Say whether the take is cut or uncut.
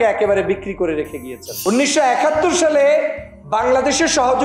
cut